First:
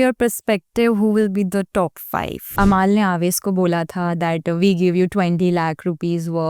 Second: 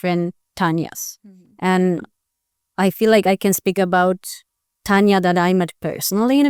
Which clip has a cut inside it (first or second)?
first